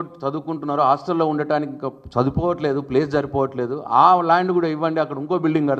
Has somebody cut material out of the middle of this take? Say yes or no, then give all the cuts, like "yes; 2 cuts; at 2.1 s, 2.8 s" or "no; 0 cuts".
no; 0 cuts